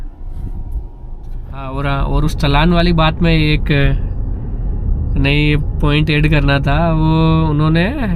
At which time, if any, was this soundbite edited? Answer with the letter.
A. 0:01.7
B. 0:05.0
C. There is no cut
A